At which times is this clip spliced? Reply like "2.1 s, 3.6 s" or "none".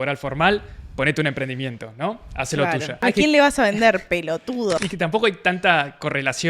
3.0 s, 4.8 s